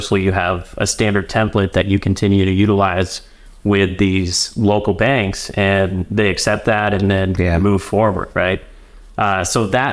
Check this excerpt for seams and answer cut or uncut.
uncut